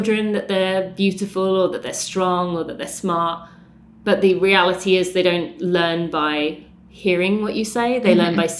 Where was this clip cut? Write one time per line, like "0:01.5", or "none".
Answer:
none